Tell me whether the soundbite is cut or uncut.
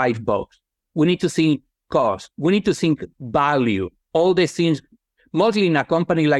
uncut